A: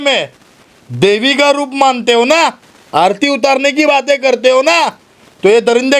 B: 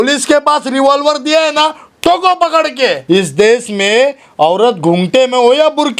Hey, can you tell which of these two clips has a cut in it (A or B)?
B